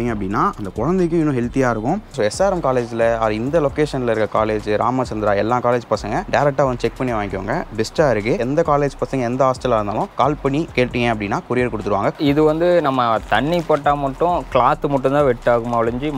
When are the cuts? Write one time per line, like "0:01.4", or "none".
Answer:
0:02.2
0:06.2
0:08.5
0:10.1
0:12.1

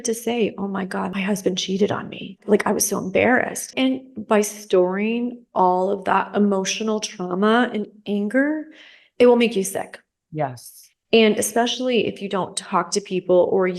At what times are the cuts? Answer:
0:01.1
0:02.4
0:03.6

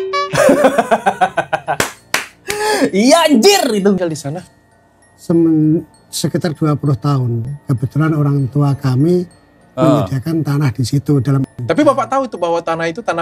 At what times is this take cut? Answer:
0:04.0
0:11.5

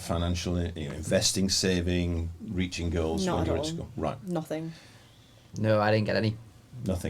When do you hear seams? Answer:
none

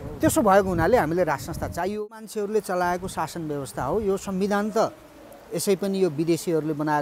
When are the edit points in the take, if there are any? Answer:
0:02.0

